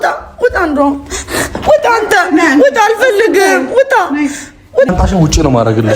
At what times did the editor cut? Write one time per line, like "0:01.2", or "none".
0:04.9